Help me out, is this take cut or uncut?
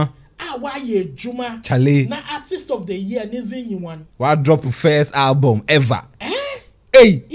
uncut